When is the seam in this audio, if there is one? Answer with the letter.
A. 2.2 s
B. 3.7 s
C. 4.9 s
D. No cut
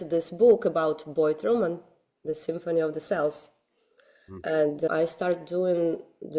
C